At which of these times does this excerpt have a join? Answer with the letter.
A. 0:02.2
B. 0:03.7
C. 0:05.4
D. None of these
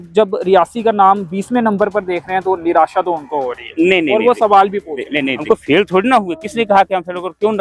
C